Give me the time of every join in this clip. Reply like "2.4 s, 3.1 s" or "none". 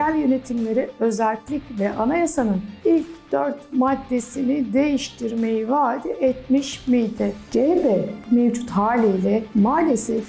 7.4 s